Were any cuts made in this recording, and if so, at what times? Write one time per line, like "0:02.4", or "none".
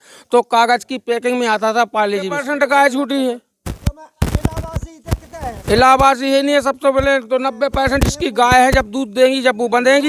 0:02.5

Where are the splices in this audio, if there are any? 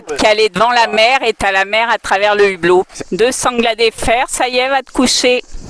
0:03.0

